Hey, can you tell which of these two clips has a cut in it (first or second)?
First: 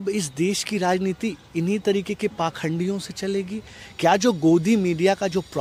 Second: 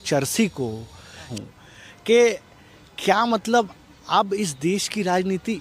second